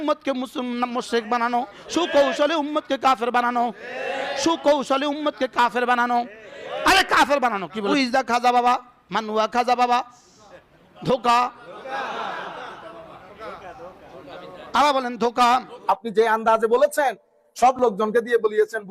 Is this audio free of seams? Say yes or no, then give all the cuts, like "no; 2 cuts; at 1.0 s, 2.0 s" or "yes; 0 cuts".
no; 2 cuts; at 7.9 s, 15.7 s